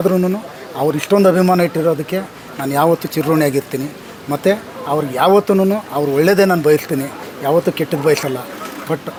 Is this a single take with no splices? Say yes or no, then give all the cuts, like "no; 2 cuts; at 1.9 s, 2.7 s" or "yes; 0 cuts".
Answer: yes; 0 cuts